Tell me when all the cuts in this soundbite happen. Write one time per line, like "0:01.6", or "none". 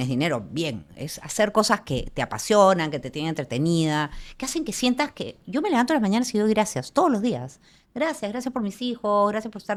none